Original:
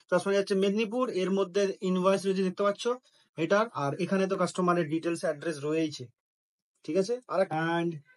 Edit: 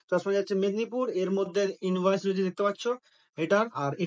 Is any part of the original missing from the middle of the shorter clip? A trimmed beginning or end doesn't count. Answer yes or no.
no